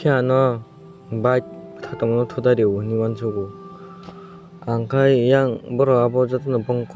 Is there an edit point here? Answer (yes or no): no